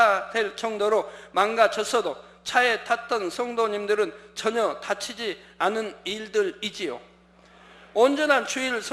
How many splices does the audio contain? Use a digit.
0